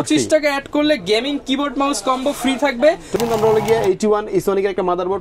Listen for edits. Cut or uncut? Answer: cut